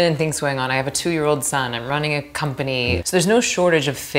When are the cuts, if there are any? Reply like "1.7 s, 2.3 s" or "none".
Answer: 3.0 s